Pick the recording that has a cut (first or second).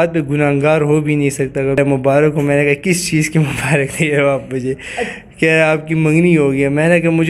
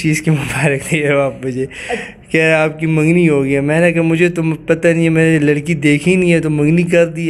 first